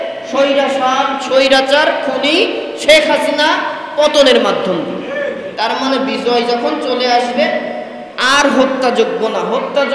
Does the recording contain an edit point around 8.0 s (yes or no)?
no